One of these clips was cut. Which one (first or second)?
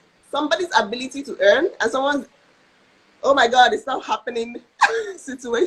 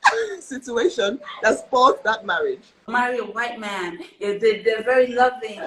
second